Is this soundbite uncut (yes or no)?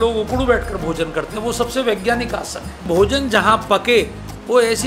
no